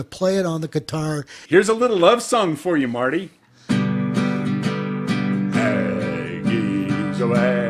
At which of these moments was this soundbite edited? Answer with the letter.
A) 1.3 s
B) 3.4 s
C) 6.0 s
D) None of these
A